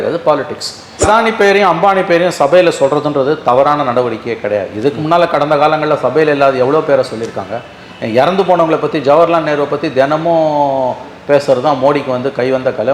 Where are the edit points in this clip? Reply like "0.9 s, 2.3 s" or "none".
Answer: 1.0 s